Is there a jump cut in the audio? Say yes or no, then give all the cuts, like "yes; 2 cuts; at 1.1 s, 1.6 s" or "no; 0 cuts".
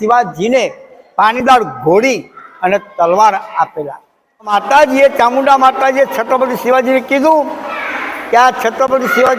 no; 0 cuts